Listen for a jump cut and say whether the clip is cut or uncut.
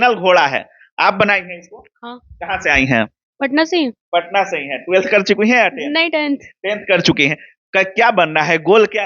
uncut